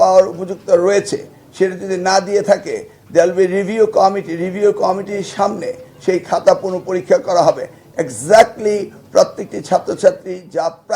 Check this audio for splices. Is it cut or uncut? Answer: uncut